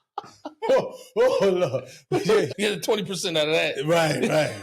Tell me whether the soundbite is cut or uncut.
cut